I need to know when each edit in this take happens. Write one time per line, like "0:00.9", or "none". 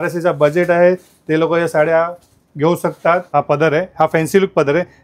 0:03.3